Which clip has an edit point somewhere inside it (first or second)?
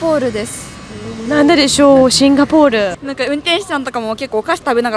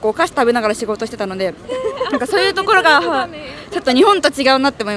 first